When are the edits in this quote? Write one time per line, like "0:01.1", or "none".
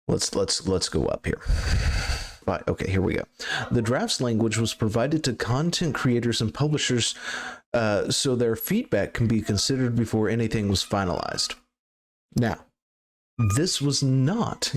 0:02.4